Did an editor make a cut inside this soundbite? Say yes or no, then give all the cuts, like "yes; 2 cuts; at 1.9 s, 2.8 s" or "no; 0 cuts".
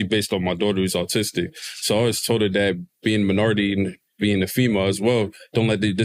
no; 0 cuts